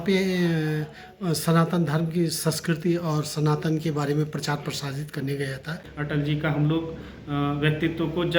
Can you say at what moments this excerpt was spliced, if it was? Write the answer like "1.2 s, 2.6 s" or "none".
5.8 s